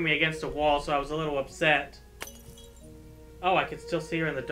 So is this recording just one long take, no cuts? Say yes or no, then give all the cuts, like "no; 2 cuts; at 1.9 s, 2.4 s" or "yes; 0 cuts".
yes; 0 cuts